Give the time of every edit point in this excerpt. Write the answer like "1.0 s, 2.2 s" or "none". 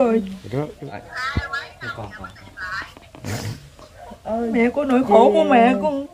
1.1 s